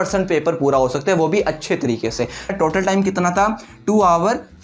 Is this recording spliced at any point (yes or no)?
yes